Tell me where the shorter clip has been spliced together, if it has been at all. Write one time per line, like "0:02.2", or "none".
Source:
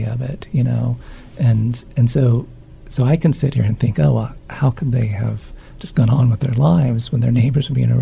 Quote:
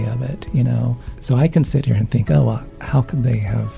0:01.1